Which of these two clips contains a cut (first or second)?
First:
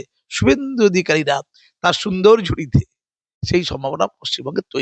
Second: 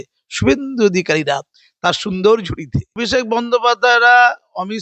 second